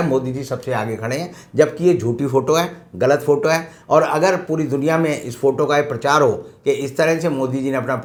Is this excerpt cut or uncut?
uncut